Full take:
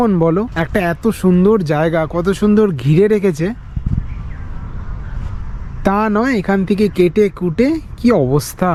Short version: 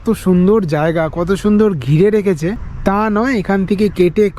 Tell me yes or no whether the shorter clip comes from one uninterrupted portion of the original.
no